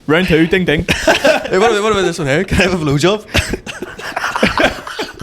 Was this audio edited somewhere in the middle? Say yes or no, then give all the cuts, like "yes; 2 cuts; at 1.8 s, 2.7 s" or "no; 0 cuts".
yes; 1 cut; at 1.5 s